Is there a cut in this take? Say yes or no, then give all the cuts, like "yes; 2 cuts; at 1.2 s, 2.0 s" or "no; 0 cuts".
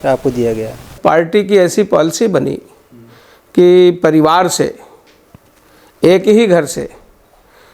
yes; 1 cut; at 0.9 s